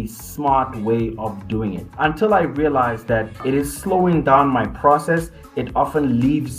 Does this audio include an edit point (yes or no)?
yes